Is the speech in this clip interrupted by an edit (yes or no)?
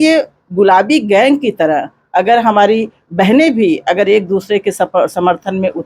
no